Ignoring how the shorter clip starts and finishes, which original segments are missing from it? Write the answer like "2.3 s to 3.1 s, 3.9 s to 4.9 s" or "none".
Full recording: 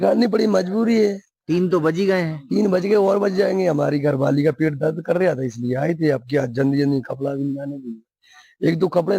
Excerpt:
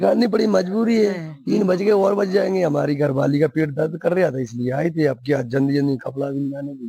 1.3 s to 2.4 s